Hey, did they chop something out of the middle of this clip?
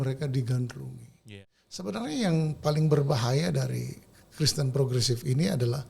yes; 1 cut; at 1.3 s

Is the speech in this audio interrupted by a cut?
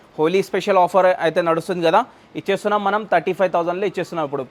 no; 0 cuts

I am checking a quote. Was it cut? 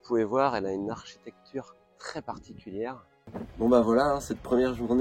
yes; 1 cut; at 3.2 s

